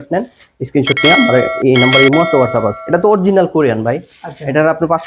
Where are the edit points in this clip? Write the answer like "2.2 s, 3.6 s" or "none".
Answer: 2.8 s